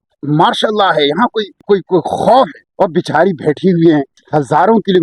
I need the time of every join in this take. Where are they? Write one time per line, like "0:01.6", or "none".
0:01.6
0:02.6
0:04.2